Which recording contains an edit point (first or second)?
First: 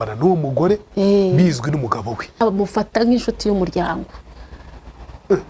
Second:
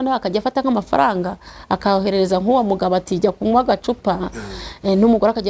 first